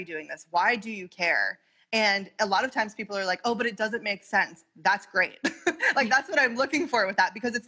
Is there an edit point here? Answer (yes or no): no